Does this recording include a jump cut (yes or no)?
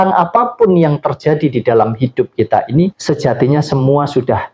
yes